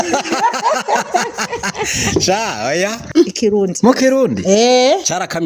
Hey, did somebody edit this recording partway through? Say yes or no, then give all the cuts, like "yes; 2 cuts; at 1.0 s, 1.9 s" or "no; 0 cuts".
yes; 1 cut; at 3.0 s